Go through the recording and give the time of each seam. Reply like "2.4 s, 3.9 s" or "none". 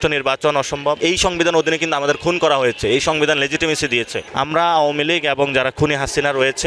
1.0 s, 4.2 s